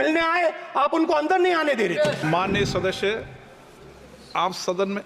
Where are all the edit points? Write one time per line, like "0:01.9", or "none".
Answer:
0:02.2